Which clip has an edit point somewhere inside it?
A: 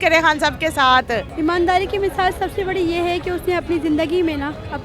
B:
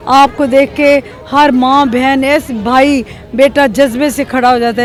A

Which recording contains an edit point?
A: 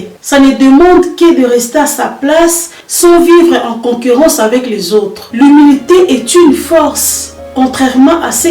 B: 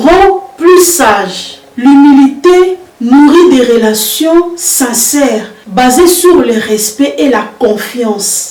A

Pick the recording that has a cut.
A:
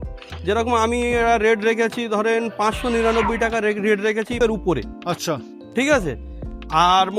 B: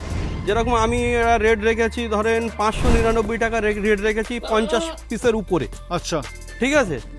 A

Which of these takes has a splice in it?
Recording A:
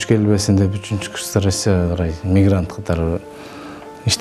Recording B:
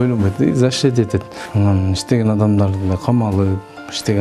B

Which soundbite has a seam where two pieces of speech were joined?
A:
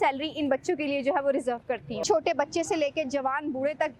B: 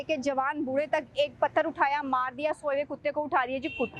A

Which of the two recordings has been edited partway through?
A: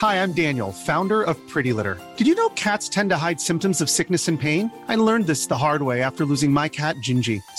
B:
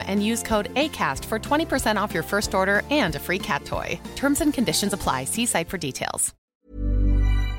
B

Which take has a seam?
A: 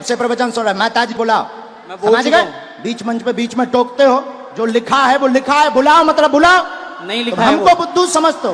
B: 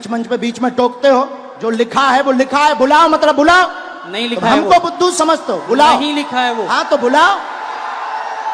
A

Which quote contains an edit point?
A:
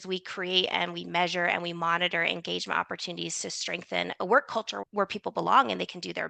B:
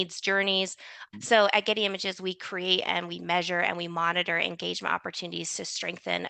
B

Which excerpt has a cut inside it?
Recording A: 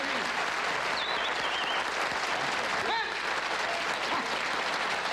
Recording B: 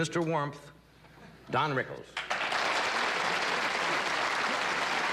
A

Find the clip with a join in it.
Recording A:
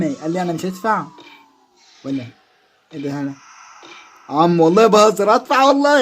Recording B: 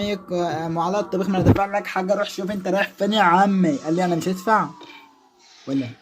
A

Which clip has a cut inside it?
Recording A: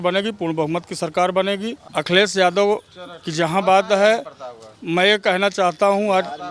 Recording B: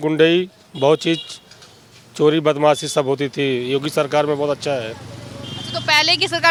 A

